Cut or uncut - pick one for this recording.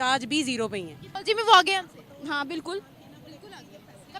cut